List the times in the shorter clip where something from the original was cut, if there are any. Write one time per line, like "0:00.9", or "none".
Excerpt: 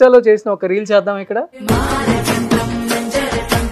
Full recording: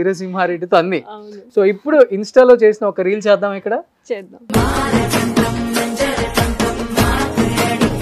0:01.5